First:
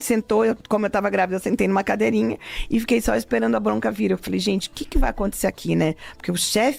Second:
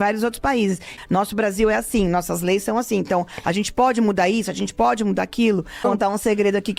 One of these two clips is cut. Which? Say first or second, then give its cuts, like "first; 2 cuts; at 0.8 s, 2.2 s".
second; 2 cuts; at 0.9 s, 5.8 s